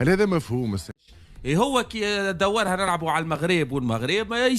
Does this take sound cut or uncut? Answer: cut